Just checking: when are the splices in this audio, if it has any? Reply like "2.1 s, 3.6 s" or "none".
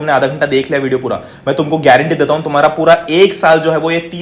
none